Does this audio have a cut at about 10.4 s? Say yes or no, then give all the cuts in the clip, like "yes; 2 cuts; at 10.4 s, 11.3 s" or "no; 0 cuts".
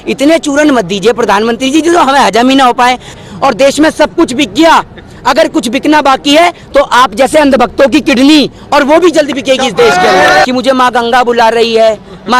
yes; 2 cuts; at 3.2 s, 10.4 s